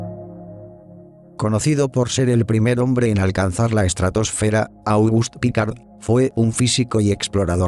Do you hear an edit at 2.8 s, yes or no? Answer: no